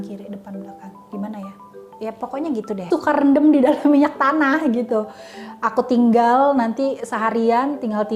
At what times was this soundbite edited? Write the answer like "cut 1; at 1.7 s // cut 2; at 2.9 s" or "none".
cut 1; at 2.9 s